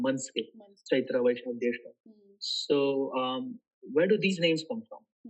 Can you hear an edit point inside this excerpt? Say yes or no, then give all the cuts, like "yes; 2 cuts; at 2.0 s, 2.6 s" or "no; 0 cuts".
no; 0 cuts